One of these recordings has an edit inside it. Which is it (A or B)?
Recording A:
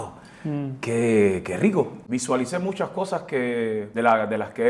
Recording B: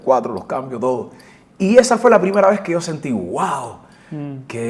A